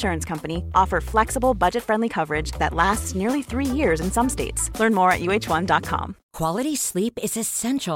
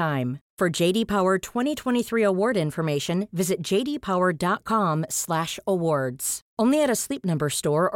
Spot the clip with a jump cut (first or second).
first